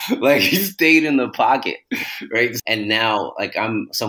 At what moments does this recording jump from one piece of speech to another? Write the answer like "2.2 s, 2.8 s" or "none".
2.6 s